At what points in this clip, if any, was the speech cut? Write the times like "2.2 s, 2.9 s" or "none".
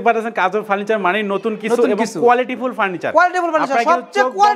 none